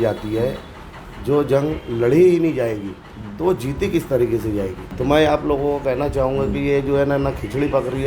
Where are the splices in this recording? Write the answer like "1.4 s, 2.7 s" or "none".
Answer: 4.8 s